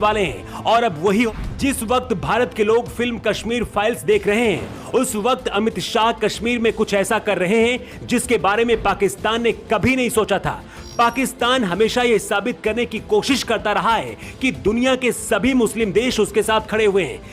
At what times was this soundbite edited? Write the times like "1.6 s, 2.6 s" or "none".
1.3 s